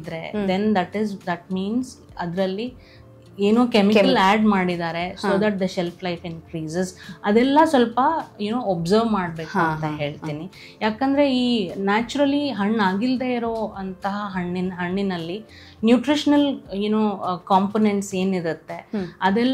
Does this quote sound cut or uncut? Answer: uncut